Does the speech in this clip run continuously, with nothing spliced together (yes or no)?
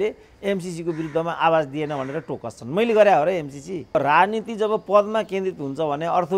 no